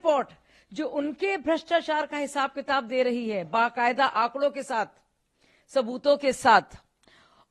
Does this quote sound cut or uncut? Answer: uncut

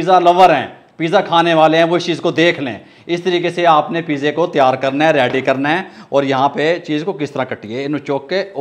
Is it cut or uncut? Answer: uncut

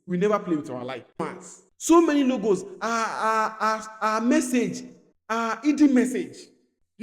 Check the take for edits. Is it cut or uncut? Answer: cut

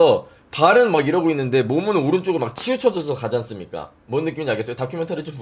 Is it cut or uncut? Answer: uncut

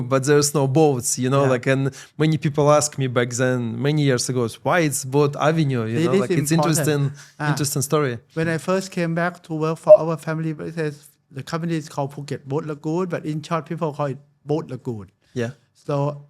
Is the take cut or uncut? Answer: uncut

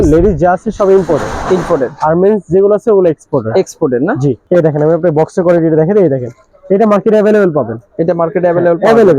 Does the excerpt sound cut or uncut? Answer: cut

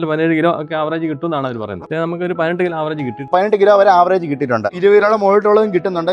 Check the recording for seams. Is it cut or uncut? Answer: cut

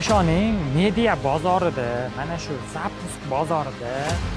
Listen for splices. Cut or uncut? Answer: uncut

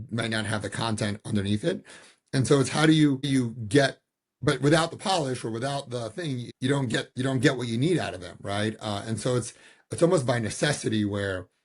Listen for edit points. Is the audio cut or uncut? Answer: cut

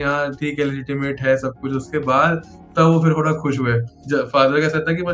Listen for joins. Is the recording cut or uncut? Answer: cut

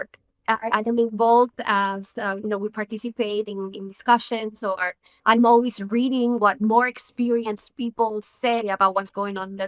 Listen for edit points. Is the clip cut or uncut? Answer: uncut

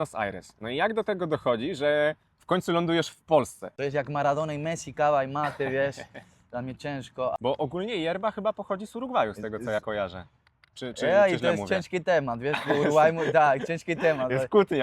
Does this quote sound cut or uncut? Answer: cut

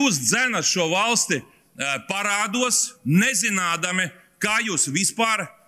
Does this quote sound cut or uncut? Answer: uncut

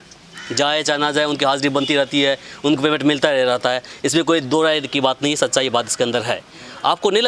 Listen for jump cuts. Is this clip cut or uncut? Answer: uncut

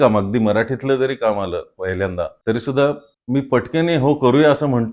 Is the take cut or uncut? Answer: cut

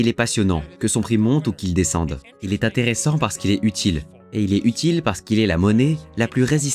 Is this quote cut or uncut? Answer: uncut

